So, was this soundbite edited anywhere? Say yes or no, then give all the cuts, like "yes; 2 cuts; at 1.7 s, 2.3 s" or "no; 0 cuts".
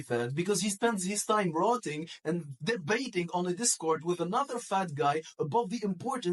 no; 0 cuts